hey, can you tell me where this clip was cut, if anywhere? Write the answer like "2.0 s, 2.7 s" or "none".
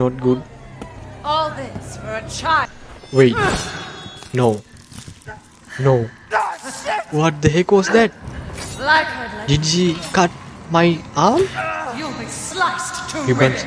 2.7 s

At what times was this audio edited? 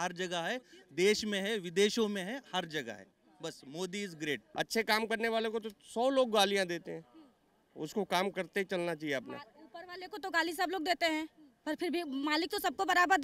4.4 s

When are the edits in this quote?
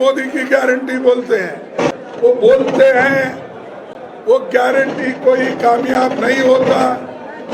1.9 s

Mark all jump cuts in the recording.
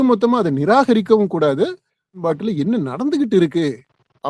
2.2 s

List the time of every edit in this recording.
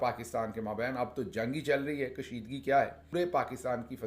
3.0 s

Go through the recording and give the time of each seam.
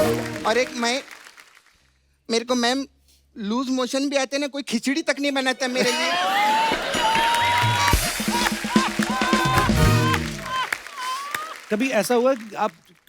11.5 s

